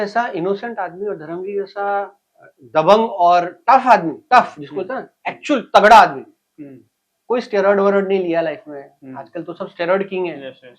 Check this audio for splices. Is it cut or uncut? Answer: uncut